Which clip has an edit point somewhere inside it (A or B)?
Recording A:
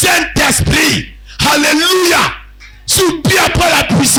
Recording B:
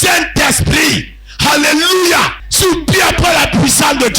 B